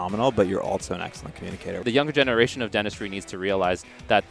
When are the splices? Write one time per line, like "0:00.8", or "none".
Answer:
0:01.8